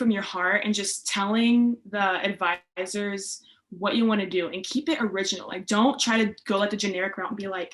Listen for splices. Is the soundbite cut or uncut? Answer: uncut